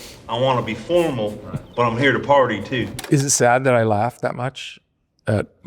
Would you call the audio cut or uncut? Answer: cut